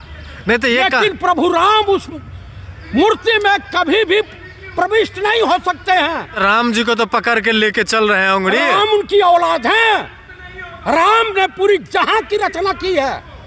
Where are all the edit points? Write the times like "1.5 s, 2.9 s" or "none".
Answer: 6.4 s